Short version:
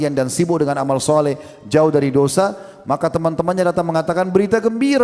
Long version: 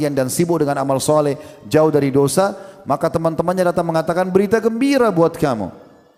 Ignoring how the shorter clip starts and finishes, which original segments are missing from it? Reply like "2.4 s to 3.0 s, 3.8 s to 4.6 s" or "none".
none